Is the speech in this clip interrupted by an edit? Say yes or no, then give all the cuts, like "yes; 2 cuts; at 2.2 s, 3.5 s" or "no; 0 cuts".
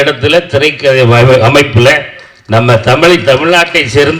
no; 0 cuts